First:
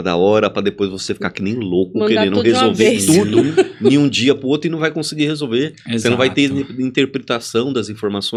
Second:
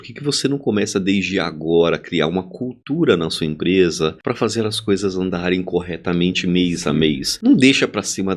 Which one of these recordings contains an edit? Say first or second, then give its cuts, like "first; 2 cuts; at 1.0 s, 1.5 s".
second; 2 cuts; at 4.2 s, 7.3 s